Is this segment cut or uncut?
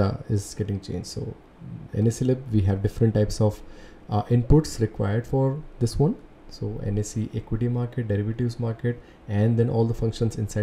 uncut